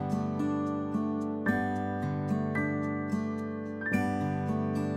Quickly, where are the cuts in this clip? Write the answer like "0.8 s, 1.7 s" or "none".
none